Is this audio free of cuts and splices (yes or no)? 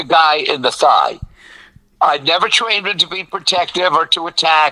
yes